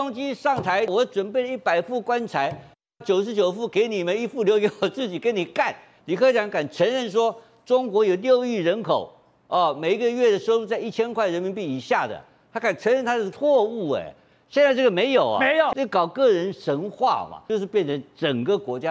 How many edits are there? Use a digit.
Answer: 5